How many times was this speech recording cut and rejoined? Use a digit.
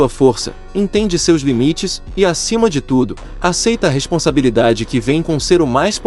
0